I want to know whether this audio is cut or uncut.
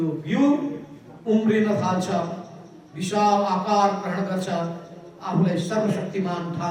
uncut